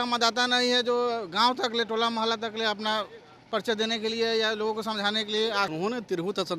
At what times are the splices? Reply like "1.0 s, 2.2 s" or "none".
5.7 s